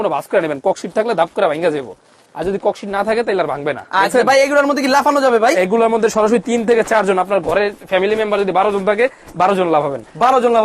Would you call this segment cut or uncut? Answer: uncut